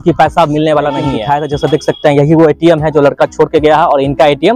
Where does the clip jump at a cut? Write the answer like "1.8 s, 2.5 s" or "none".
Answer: 1.2 s